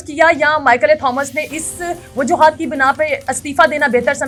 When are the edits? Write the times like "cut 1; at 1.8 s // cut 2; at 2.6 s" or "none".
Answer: none